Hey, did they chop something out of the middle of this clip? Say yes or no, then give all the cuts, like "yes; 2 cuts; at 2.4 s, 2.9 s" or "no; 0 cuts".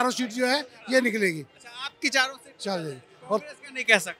no; 0 cuts